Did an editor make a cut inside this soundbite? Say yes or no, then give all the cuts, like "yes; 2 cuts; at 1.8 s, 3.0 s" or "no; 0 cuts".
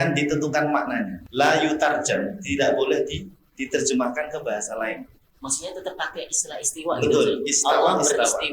yes; 1 cut; at 1.2 s